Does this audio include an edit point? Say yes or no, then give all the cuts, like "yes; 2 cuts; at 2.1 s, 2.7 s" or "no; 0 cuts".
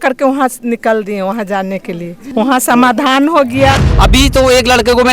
yes; 2 cuts; at 2.1 s, 3.9 s